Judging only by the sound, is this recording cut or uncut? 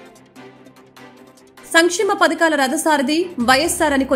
cut